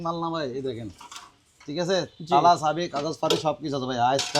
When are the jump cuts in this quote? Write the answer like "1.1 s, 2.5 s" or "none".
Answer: none